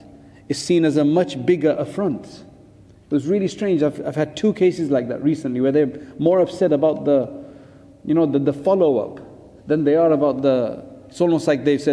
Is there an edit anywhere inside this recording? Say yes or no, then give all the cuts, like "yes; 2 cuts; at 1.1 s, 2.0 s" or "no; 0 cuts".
no; 0 cuts